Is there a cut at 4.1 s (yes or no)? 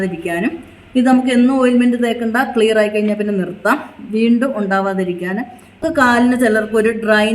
no